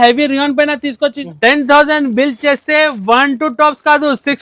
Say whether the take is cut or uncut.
cut